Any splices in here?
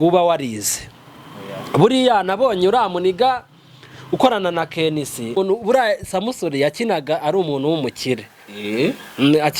yes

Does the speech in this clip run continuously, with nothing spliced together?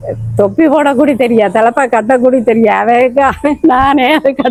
yes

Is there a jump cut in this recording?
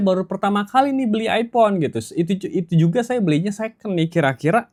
no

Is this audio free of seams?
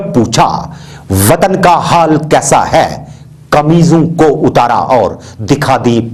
yes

